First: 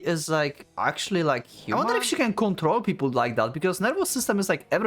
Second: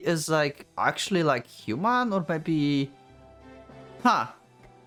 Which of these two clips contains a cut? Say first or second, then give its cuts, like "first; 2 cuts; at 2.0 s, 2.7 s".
first; 1 cut; at 1.6 s